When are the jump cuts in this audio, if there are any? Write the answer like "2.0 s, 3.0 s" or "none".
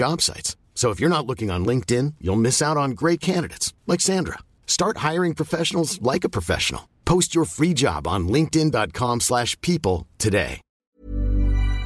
10.8 s